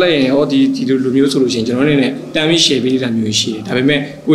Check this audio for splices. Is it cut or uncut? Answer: uncut